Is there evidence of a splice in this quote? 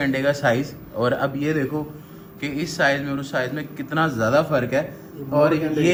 no; 0 cuts

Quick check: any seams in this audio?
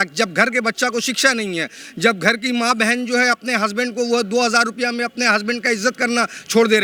no; 0 cuts

